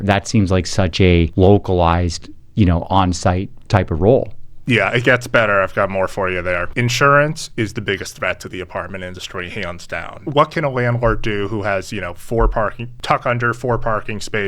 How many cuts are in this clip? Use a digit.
5